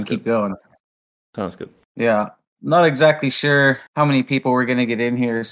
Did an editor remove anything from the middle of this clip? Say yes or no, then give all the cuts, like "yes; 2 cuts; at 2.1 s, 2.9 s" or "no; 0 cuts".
yes; 2 cuts; at 1.8 s, 3.9 s